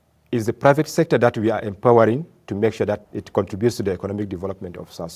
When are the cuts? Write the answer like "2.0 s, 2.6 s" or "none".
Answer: 3.0 s